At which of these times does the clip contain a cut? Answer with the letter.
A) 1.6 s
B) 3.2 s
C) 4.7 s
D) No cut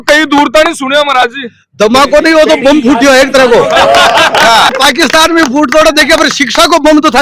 C